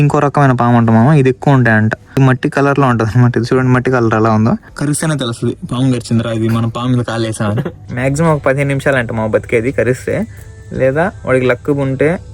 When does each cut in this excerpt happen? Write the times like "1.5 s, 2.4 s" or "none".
2.2 s, 4.7 s, 7.8 s